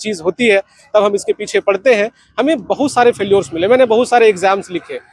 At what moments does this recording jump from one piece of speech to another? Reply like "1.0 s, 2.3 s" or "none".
none